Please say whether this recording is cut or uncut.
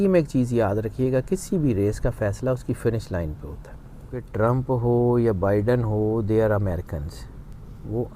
cut